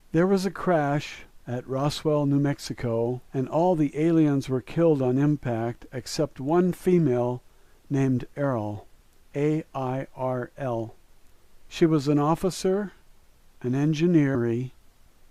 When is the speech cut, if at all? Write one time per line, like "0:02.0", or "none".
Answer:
none